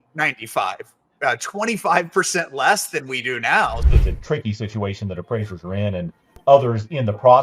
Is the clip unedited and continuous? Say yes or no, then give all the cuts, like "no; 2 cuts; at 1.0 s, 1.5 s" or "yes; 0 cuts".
no; 1 cut; at 3.8 s